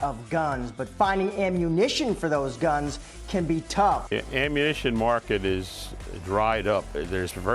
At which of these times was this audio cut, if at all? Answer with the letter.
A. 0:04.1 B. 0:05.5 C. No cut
C